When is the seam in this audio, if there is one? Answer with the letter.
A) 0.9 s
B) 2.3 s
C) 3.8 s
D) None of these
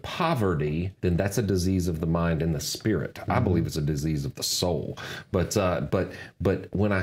A